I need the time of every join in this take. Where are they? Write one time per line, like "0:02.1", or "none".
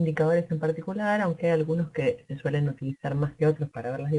0:02.2